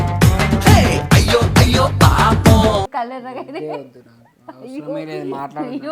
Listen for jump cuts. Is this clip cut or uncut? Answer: uncut